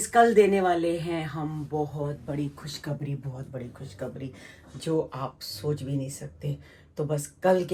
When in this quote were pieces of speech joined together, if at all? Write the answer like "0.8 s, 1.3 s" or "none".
none